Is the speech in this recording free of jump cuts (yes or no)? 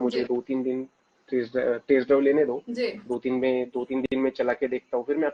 yes